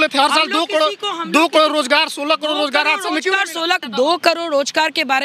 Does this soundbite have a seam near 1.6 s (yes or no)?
no